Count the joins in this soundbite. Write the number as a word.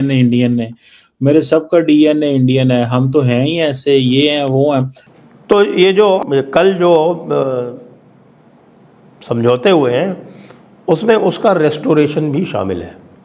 two